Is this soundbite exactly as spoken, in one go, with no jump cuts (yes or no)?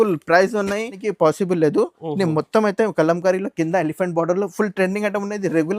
no